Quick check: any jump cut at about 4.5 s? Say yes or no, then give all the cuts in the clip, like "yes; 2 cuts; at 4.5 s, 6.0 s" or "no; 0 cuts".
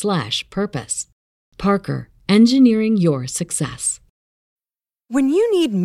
yes; 1 cut; at 4.5 s